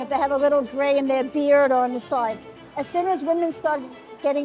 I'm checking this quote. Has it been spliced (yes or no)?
no